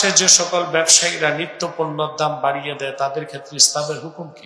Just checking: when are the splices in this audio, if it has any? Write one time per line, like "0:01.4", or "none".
none